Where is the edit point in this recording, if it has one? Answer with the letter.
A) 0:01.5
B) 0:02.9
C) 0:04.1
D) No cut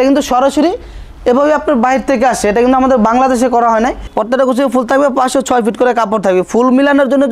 C